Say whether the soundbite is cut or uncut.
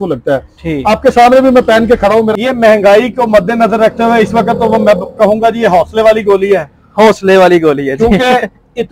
cut